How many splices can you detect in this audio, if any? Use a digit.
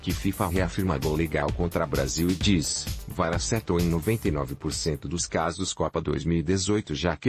0